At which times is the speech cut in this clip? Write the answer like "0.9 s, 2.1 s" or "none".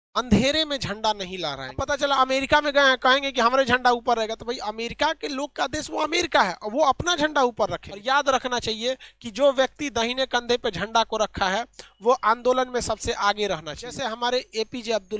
1.8 s, 7.9 s, 14.0 s